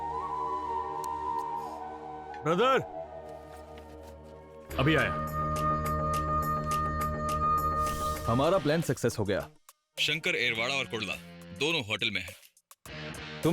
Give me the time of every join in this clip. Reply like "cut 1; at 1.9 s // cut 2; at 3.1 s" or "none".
cut 1; at 8.2 s